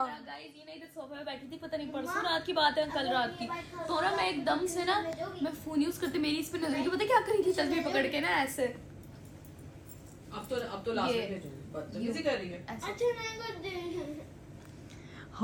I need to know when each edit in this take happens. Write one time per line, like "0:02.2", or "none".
none